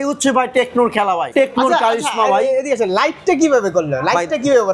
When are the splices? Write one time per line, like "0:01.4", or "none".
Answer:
0:01.3